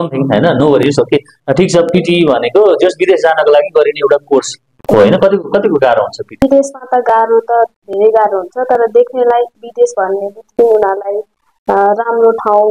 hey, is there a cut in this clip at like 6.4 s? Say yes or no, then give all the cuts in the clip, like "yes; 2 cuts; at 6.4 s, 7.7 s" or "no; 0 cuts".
yes; 1 cut; at 6.4 s